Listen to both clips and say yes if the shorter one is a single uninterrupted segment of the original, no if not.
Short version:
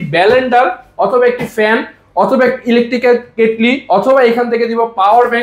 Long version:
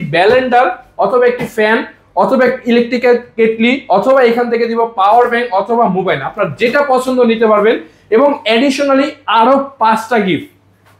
yes